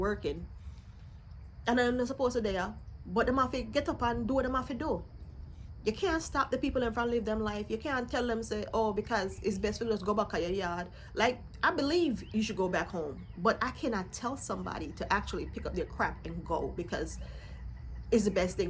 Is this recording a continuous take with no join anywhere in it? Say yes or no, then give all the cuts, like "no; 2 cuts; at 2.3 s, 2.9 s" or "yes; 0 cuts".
yes; 0 cuts